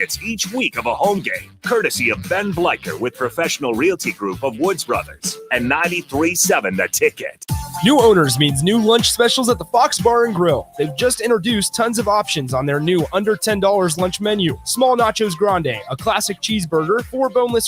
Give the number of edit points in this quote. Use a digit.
1